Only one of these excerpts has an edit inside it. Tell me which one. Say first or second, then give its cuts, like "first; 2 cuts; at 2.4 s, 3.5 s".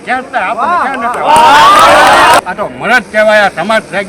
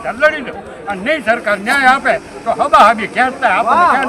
first; 1 cut; at 2.4 s